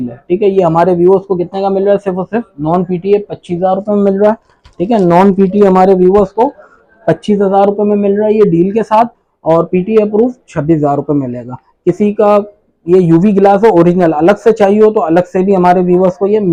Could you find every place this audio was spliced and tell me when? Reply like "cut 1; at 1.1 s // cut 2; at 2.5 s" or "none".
none